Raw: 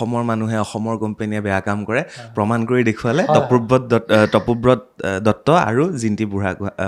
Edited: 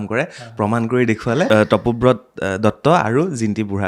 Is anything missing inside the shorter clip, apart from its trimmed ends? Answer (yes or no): yes